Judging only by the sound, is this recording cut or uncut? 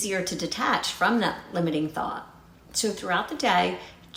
uncut